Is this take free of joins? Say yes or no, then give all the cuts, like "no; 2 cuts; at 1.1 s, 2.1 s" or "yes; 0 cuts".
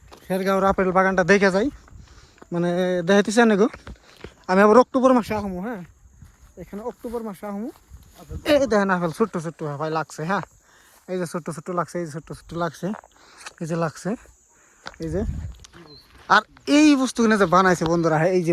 no; 1 cut; at 15.5 s